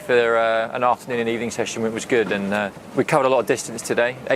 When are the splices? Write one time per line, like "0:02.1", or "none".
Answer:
0:02.8